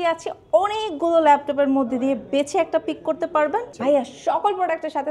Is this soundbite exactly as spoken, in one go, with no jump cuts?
no; 1 cut; at 3.7 s

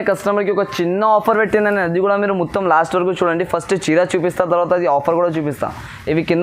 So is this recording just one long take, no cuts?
yes; 0 cuts

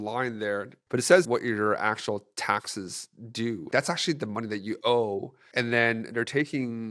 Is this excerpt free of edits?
no; 2 cuts; at 1.3 s, 3.7 s

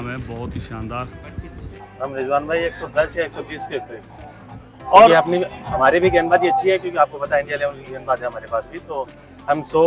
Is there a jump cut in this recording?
yes; 1 cut; at 1.8 s

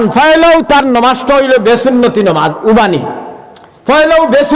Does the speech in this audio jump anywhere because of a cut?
no; 0 cuts

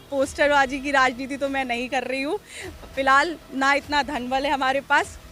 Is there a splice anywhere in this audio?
no; 0 cuts

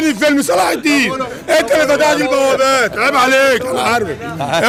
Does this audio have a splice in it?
no; 0 cuts

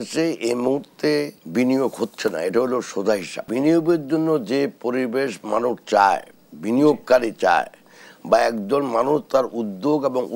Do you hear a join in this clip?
yes; 2 cuts; at 1.4 s, 3.4 s

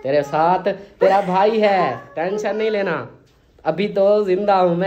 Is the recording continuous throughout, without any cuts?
yes; 0 cuts

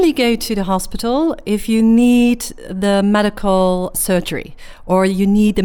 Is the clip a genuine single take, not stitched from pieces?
no; 1 cut; at 4.0 s

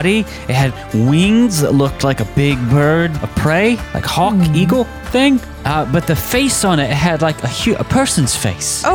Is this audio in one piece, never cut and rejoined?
no; 2 cuts; at 3.2 s, 5.5 s

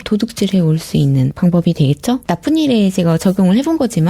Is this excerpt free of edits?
no; 1 cut; at 1.3 s

